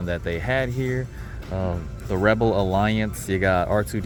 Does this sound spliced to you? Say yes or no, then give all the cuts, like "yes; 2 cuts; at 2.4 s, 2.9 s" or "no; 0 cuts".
no; 0 cuts